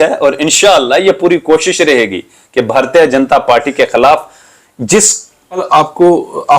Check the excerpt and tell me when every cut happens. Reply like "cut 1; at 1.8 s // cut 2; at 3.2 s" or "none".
cut 1; at 5.6 s